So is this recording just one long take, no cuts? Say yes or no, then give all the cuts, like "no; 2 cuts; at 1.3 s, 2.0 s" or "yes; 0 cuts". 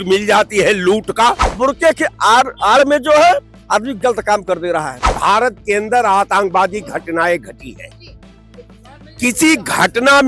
no; 2 cuts; at 1.5 s, 5.1 s